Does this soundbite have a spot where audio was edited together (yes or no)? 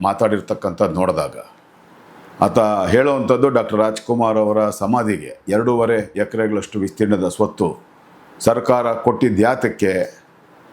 no